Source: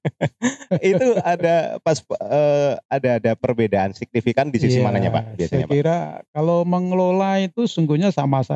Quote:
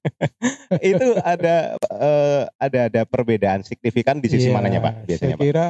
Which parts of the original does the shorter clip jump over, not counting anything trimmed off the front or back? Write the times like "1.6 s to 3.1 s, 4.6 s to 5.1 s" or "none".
1.8 s to 2.1 s

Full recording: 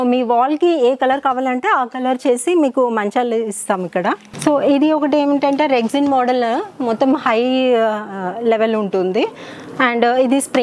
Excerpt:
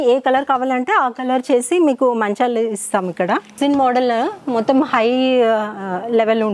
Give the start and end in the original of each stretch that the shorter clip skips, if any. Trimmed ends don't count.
4.3 s to 5.9 s

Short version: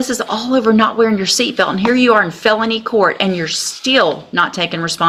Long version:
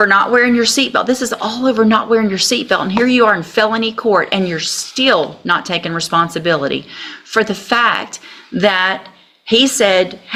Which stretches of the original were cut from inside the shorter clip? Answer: none

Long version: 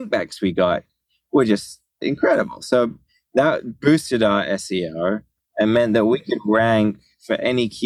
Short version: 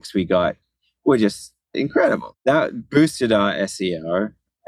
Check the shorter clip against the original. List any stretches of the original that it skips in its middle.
2.6 s to 3.2 s

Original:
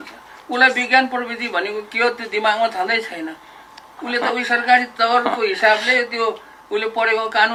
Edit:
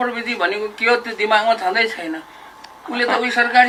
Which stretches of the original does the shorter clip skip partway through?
none

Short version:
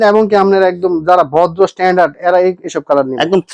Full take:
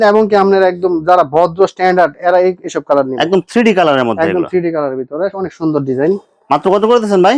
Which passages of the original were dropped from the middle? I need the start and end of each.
none

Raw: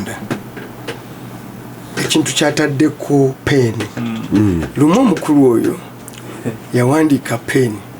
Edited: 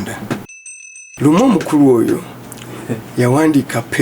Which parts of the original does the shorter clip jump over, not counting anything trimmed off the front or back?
1.1 s to 4.7 s

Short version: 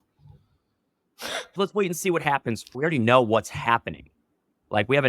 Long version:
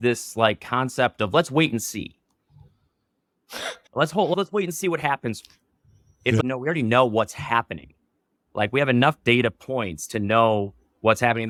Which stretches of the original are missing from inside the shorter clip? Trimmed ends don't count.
3.9 s to 4.4 s, 5.5 s to 6.6 s

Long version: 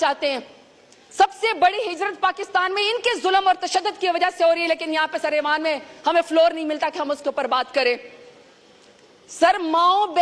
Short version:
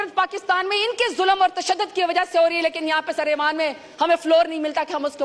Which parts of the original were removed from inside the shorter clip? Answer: none

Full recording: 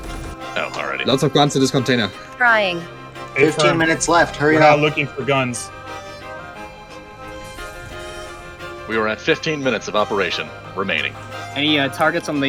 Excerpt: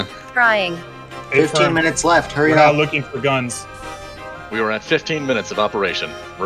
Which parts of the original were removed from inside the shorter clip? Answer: 6.5 s to 8.8 s

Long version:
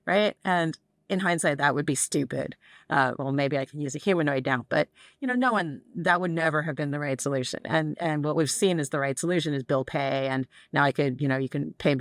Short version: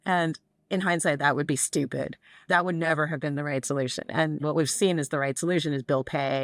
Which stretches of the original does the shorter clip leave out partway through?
2.7 s to 5.8 s, 8.0 s to 8.2 s

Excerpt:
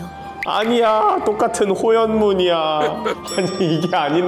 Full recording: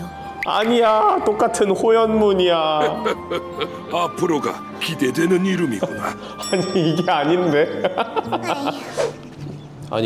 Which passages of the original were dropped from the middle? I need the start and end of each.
3.2 s to 6.4 s

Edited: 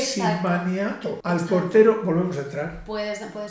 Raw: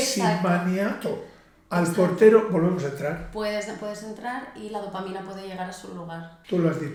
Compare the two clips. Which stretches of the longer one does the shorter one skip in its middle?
1.2 s to 1.6 s

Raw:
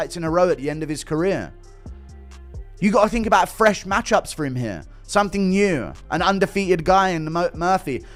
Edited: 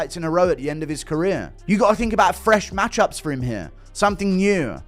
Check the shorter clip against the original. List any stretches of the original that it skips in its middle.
1.5 s to 2.7 s

